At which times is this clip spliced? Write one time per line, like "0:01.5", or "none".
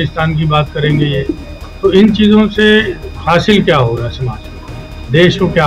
none